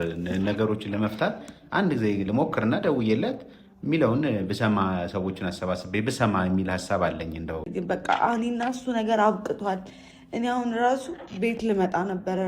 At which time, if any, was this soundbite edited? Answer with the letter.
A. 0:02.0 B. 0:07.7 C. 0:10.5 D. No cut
B